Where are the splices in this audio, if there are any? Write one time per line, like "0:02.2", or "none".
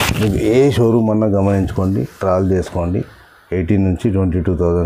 none